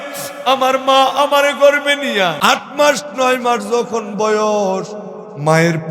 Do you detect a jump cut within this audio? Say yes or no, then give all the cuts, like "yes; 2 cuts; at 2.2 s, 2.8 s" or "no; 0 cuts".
yes; 1 cut; at 2.3 s